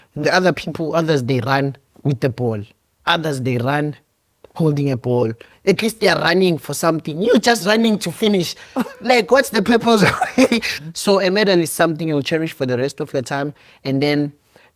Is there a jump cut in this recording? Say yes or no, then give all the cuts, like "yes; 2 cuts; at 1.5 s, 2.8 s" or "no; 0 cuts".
yes; 2 cuts; at 1.9 s, 10.8 s